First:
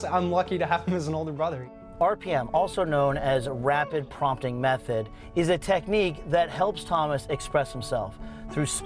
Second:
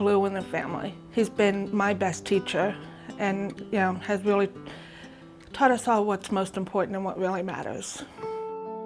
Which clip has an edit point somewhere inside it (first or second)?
first